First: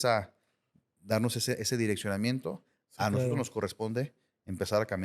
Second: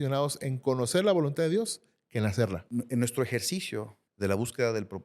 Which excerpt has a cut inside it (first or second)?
second